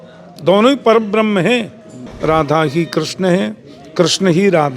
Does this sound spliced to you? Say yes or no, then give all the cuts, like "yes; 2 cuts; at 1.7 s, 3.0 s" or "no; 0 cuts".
yes; 1 cut; at 2.0 s